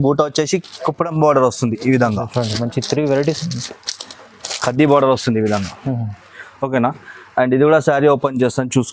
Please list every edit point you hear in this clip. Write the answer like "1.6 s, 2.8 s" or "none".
none